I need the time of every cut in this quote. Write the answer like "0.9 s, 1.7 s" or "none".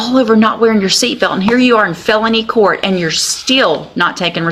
none